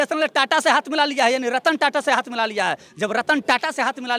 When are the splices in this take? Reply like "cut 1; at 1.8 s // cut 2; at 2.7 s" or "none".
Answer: none